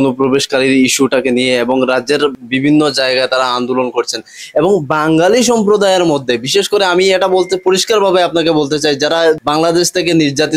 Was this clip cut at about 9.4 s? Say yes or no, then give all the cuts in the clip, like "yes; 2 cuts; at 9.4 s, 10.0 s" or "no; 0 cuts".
yes; 2 cuts; at 2.3 s, 9.4 s